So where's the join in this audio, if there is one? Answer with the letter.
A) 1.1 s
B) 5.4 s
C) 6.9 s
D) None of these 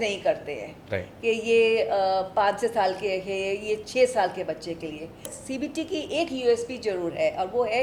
B